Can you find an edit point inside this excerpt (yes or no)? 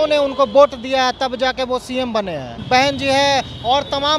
yes